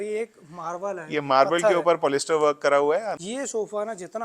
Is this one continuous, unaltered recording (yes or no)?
no